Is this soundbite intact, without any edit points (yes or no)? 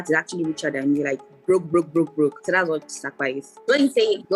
no